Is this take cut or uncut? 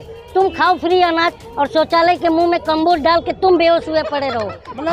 uncut